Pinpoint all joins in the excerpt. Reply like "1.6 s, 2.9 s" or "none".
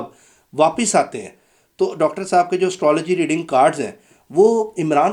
none